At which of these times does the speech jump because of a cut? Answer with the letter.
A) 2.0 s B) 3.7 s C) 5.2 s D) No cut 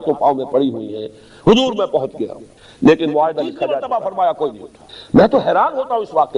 B